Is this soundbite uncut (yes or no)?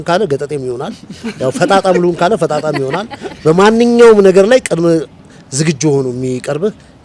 yes